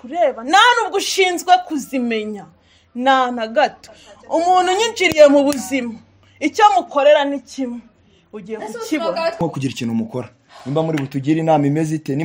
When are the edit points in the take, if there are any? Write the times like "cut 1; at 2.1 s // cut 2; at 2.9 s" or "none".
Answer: cut 1; at 9.4 s